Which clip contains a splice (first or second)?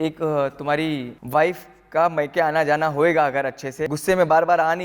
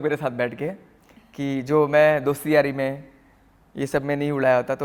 first